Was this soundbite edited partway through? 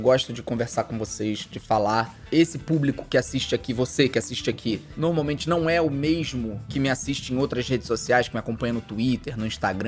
no; 0 cuts

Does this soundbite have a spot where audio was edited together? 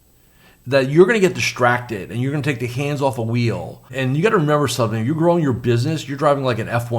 yes; 1 cut; at 3.9 s

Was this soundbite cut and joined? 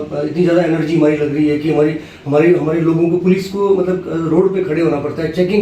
no; 0 cuts

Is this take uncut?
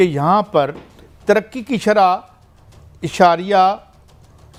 yes; 0 cuts

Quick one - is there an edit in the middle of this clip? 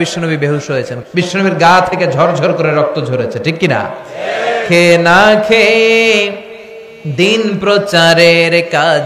yes; 1 cut; at 0.9 s

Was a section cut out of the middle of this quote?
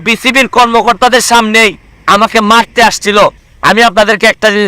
yes; 1 cut; at 3.4 s

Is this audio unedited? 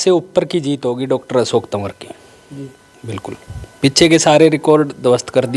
yes; 0 cuts

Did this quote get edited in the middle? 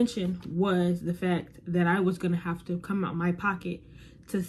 no; 0 cuts

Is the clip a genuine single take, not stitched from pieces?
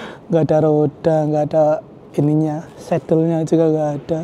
yes; 0 cuts

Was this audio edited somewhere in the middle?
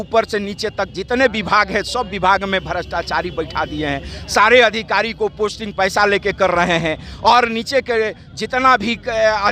no; 0 cuts

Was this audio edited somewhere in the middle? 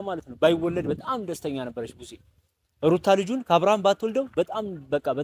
no; 0 cuts

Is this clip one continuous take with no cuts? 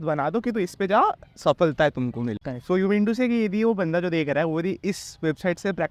no; 1 cut; at 2.5 s

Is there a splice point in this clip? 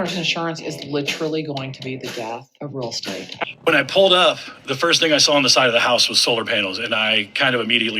yes; 1 cut; at 3.3 s

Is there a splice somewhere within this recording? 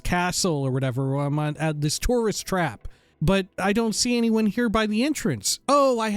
yes; 1 cut; at 3.4 s

